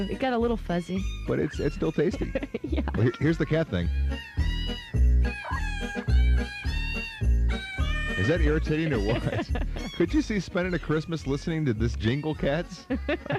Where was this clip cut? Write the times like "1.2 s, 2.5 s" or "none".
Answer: none